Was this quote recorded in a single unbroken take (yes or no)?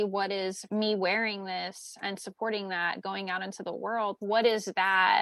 yes